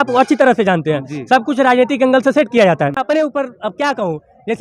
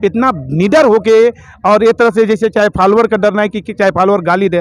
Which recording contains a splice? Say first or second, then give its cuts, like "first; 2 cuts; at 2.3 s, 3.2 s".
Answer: first; 1 cut; at 3.0 s